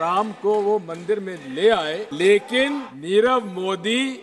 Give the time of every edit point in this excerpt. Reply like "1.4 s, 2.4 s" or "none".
2.1 s, 2.9 s